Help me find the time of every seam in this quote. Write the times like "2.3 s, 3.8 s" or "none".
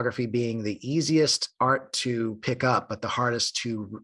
none